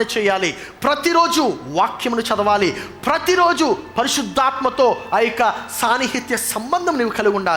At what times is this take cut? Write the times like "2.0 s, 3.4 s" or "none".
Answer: none